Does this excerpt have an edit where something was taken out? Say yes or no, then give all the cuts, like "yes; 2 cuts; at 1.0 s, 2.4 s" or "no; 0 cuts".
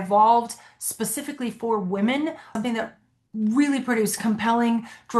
yes; 1 cut; at 2.5 s